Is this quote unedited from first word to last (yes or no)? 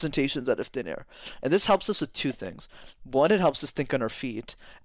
yes